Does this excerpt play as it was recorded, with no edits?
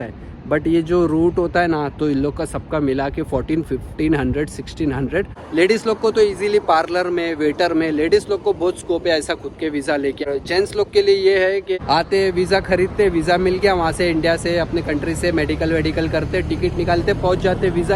no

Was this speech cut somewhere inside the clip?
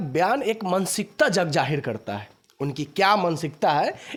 no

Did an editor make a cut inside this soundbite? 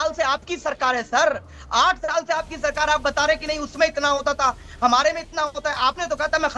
no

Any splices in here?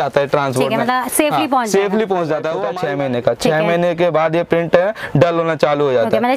yes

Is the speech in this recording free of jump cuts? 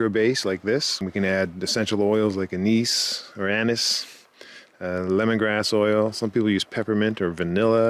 no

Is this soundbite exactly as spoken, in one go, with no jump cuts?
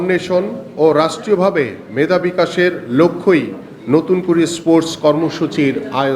yes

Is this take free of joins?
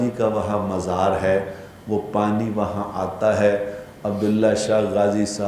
yes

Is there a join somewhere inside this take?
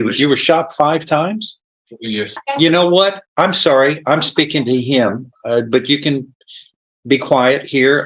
yes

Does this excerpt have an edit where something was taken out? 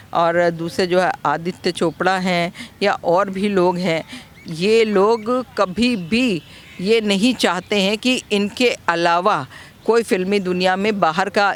no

